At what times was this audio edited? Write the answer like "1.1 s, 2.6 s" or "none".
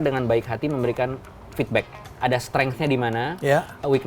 2.2 s